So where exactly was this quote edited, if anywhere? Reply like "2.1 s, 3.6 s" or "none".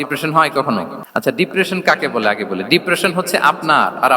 1.0 s